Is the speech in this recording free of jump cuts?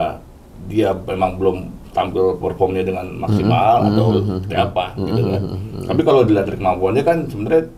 yes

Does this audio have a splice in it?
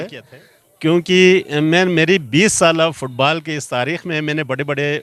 no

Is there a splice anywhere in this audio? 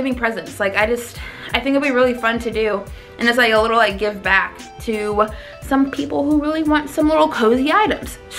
no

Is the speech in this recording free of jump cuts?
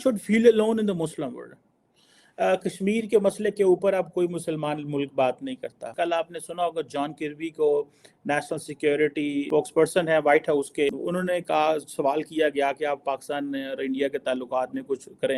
yes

